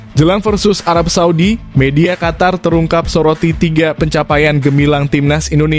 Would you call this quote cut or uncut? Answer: uncut